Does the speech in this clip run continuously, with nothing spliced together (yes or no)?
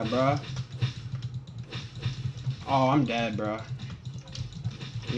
yes